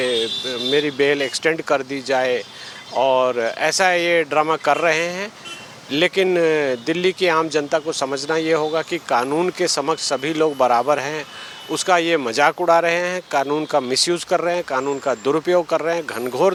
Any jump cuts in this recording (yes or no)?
no